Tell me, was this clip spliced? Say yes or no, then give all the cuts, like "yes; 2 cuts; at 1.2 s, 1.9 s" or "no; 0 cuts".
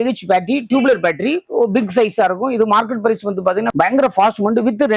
yes; 1 cut; at 3.7 s